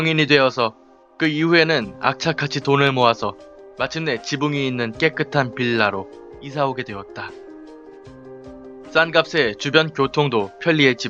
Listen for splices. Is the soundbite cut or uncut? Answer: cut